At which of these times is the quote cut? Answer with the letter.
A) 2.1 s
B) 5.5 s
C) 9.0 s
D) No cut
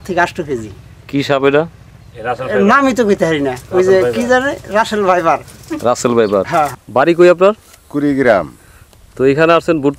D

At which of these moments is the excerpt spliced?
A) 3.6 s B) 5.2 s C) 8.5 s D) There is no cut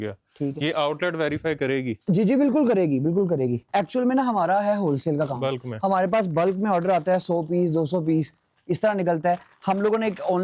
A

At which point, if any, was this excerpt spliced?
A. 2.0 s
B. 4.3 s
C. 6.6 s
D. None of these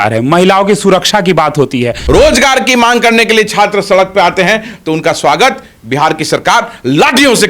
A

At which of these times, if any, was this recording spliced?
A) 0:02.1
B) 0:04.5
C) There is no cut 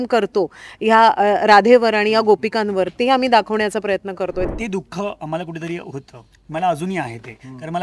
B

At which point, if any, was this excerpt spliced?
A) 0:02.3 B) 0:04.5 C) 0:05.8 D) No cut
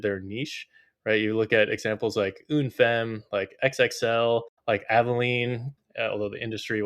B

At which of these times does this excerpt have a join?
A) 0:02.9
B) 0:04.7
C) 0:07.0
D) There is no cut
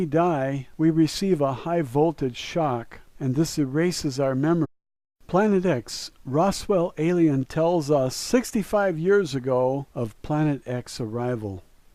D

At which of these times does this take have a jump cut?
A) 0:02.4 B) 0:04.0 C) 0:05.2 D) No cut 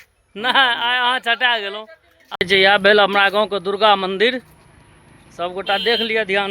A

